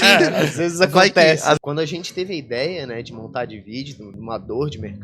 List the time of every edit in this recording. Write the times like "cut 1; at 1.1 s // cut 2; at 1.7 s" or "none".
cut 1; at 1.6 s // cut 2; at 4.1 s